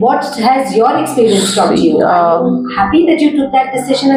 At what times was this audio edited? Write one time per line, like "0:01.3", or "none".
none